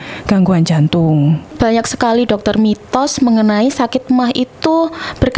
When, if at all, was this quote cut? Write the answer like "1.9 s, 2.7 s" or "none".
1.5 s